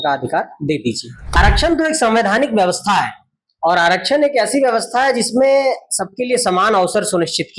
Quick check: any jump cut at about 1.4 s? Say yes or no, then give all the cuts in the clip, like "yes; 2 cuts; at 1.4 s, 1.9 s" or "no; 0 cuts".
yes; 1 cut; at 1.4 s